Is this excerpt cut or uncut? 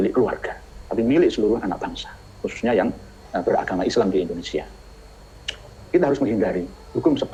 uncut